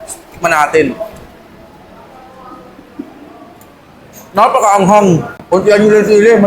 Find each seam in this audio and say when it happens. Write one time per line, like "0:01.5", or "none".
0:05.3